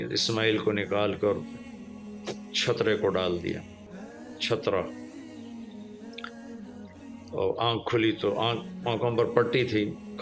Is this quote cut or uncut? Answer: uncut